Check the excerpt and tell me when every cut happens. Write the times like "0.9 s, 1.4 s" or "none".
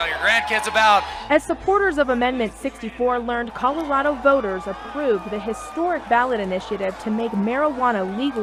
none